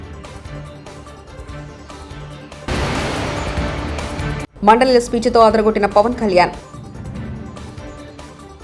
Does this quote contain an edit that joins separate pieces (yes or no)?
no